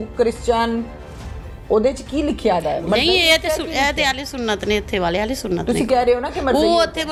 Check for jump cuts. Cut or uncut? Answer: uncut